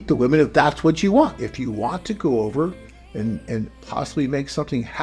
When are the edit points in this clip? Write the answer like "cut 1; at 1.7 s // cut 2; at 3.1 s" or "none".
cut 1; at 1.4 s

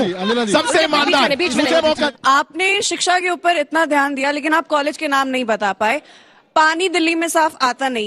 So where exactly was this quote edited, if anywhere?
cut 1; at 2.1 s

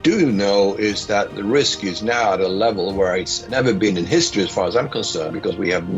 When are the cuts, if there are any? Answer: cut 1; at 3.4 s

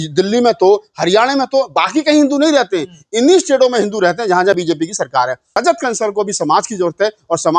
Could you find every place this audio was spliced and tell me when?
cut 1; at 5.6 s

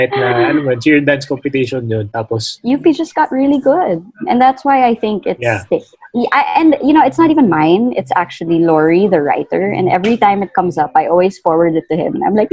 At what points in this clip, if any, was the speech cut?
cut 1; at 2.5 s

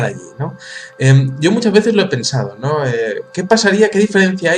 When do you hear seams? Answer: cut 1; at 3.5 s

